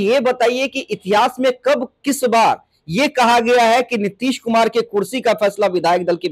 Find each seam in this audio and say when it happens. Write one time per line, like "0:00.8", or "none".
none